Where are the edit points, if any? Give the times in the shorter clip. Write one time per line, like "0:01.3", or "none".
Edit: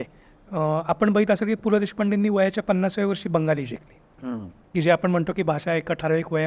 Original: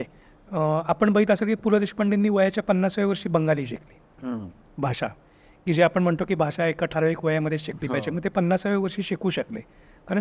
0:04.5